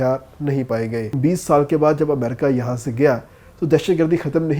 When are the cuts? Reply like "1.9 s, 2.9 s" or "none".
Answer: 1.2 s